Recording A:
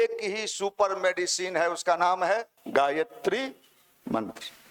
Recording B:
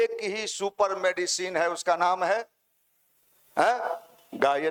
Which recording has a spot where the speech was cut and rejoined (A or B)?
A